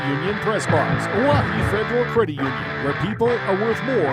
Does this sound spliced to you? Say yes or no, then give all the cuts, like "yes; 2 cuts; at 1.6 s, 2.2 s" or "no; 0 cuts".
no; 0 cuts